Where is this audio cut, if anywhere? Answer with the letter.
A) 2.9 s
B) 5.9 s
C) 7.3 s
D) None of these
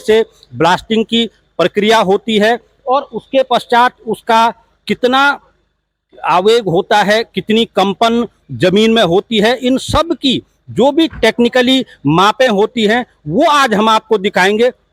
D